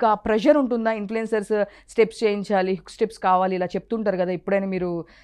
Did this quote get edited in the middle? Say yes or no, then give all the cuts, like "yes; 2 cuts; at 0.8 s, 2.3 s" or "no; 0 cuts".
no; 0 cuts